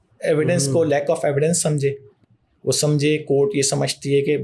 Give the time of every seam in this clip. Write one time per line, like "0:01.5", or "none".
none